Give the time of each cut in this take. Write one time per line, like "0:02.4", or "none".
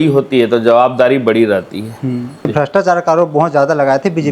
0:02.5

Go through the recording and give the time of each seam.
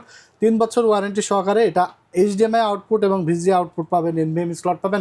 none

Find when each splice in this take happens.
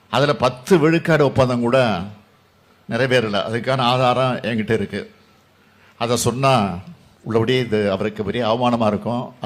none

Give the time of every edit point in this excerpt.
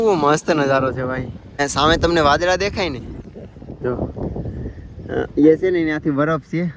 0:01.6

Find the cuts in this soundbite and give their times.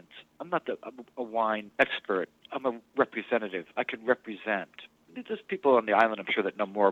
0:01.7
0:05.2

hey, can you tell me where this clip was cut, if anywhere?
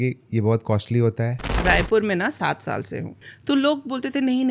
0:01.6
0:03.3

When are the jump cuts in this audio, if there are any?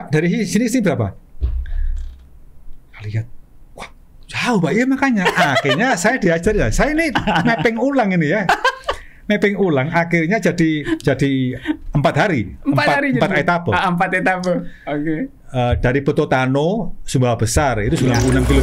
none

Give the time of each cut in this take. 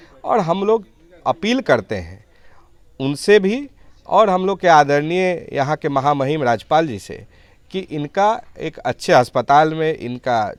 none

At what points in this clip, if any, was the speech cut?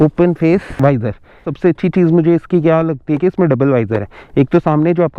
0:01.4

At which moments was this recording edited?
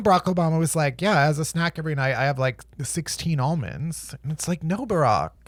none

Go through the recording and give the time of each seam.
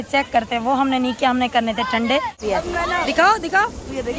0:02.4

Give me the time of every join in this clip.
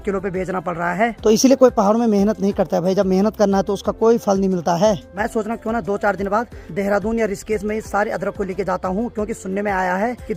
none

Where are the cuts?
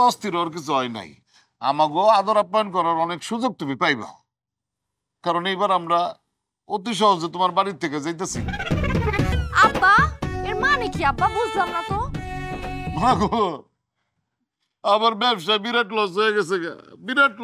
0:09.4

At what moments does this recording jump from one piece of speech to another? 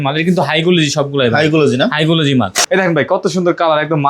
0:02.6

